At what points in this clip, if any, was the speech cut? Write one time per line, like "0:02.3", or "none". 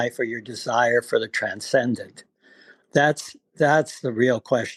none